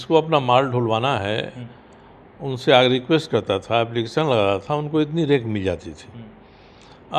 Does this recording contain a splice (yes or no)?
no